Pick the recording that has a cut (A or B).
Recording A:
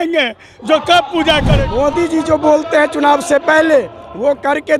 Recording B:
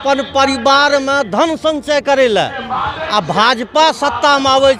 A